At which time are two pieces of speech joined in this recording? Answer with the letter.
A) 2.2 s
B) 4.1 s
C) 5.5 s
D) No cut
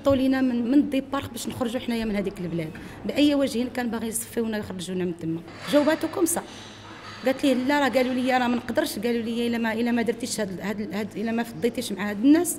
C